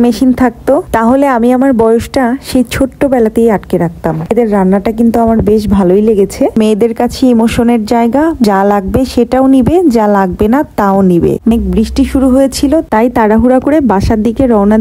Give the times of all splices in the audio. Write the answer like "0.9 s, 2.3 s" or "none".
4.3 s, 6.6 s, 8.4 s, 11.5 s